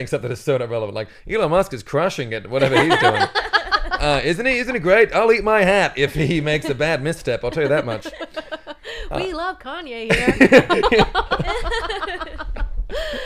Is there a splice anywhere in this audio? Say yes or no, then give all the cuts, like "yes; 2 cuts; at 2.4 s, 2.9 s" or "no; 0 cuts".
no; 0 cuts